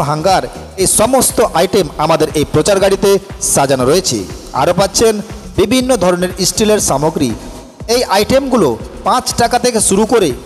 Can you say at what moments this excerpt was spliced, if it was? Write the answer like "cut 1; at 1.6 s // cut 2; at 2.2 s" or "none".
none